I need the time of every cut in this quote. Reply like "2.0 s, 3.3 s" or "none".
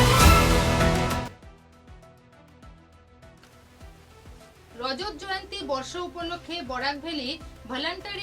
1.3 s, 3.5 s